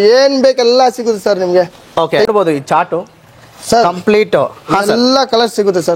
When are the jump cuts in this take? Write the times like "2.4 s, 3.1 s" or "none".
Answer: 2.3 s